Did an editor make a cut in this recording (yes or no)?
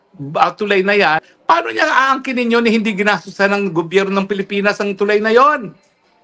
yes